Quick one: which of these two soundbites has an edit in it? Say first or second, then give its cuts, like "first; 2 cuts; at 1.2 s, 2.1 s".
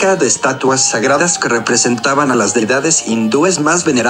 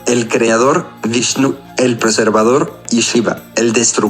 second; 2 cuts; at 0.9 s, 2.8 s